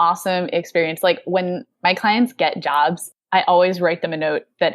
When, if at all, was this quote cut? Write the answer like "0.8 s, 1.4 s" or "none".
3.0 s